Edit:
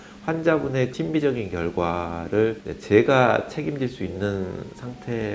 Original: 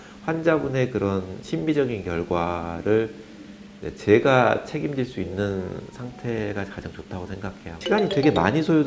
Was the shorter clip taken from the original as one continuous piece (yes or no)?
no